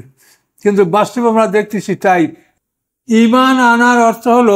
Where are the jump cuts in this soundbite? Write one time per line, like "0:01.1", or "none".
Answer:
0:02.4